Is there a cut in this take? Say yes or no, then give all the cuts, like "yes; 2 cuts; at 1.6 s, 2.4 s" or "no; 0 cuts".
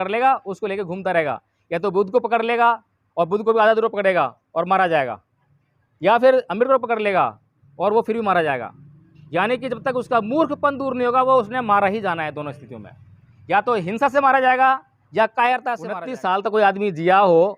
yes; 1 cut; at 15.9 s